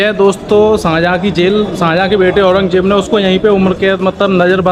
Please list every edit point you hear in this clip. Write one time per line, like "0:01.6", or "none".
none

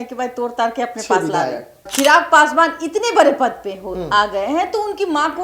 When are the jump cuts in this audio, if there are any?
0:01.9

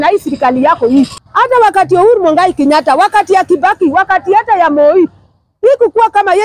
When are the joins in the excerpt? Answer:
0:01.2

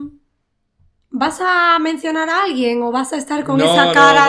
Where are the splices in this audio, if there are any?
none

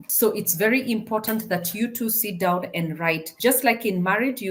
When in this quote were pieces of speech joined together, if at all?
none

